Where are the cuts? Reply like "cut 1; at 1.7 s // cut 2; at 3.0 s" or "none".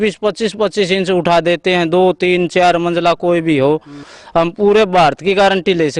cut 1; at 4.1 s